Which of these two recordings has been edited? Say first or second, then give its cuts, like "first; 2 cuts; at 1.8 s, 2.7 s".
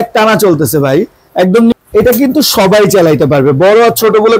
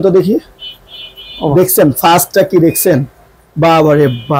first; 1 cut; at 1.7 s